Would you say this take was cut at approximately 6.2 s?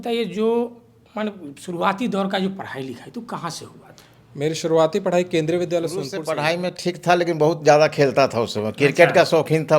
yes; 1 cut; at 6.2 s

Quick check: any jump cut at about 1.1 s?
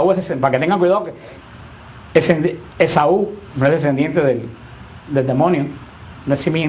yes; 1 cut; at 1.1 s

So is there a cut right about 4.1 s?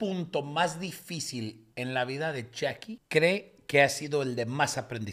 no; 2 cuts; at 1.6 s, 2.9 s

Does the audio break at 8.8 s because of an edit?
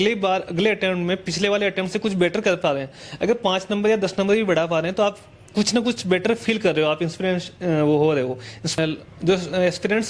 yes; 1 cut; at 8.8 s

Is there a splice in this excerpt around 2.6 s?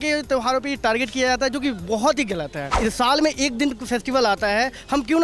yes; 1 cut; at 2.6 s

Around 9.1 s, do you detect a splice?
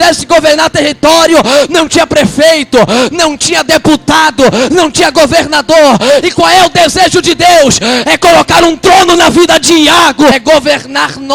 no; 1 cut; at 10.4 s

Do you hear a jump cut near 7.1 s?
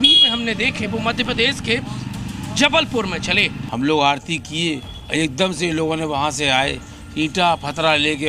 no; 2 cuts; at 3.6 s, 5.0 s

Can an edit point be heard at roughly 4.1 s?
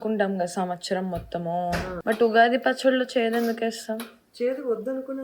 no; 1 cut; at 1.9 s

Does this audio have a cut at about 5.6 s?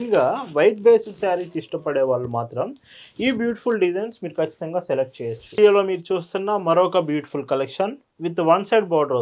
yes; 1 cut; at 5.6 s

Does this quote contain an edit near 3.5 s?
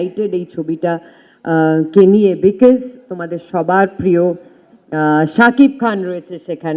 no; 0 cuts

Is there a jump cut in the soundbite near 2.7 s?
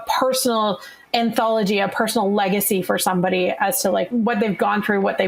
no; 2 cuts; at 1.0 s, 4.1 s

